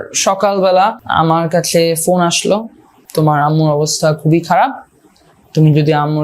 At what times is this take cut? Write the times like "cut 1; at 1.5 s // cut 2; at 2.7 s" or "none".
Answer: cut 1; at 1.0 s // cut 2; at 3.0 s